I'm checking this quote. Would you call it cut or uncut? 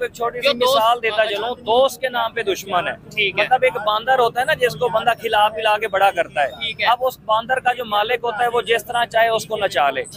uncut